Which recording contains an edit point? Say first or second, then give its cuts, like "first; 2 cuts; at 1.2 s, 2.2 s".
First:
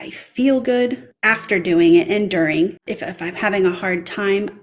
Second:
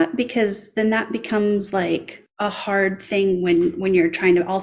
first; 1 cut; at 2.9 s